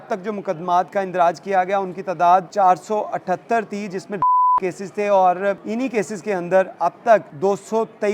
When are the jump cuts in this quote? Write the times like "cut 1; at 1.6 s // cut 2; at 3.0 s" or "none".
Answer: cut 1; at 2.5 s // cut 2; at 5.6 s // cut 3; at 7.3 s